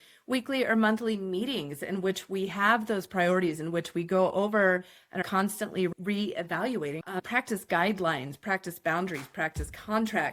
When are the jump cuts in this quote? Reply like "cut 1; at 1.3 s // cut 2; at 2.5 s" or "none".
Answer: cut 1; at 5.9 s // cut 2; at 7.0 s